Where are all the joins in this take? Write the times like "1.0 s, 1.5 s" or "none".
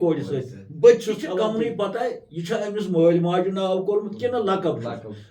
1.4 s